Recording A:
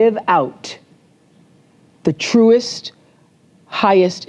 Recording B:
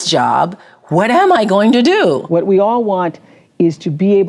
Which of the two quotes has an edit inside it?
B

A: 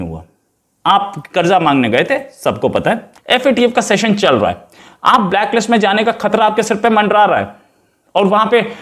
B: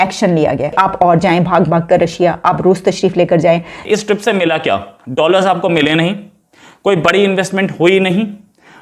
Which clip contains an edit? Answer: B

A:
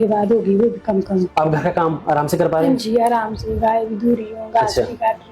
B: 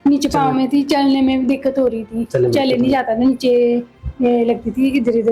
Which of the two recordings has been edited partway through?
A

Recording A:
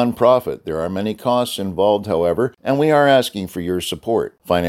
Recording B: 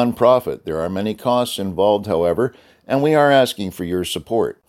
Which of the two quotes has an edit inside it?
A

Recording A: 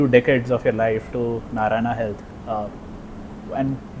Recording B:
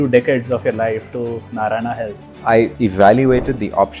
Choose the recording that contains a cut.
B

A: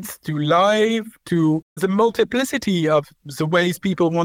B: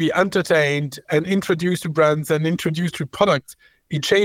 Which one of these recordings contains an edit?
A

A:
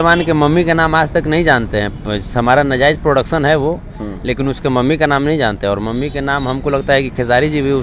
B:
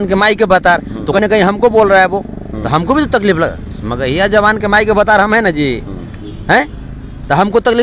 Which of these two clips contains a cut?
B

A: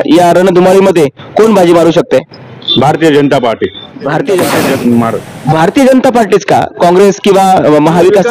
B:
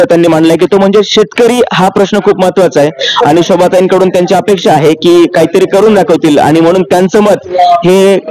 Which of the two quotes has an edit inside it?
A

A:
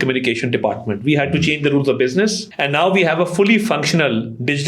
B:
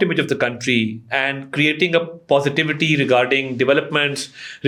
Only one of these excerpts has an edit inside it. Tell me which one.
A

